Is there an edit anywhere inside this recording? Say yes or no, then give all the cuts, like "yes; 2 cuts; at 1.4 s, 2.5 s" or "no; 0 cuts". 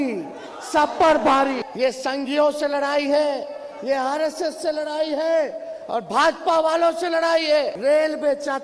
yes; 2 cuts; at 1.6 s, 7.7 s